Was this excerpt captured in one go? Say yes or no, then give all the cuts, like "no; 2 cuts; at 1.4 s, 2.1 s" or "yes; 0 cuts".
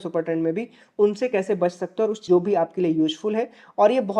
no; 1 cut; at 2.4 s